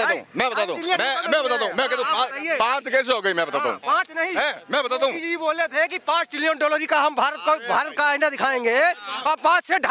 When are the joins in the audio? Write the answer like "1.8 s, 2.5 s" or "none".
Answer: none

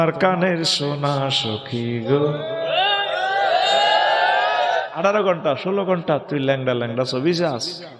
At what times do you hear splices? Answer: 4.9 s

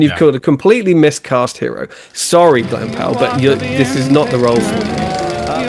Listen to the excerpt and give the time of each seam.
4.6 s

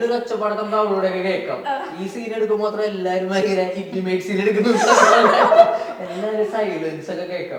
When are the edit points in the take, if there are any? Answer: none

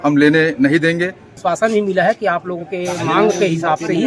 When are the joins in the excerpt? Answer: 1.4 s

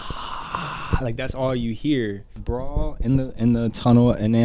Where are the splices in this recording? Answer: 2.4 s

